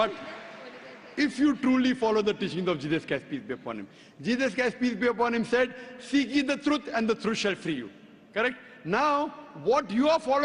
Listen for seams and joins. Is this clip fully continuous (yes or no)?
no